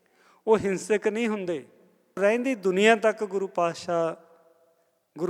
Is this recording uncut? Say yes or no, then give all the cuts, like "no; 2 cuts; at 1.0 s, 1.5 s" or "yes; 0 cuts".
no; 1 cut; at 2.2 s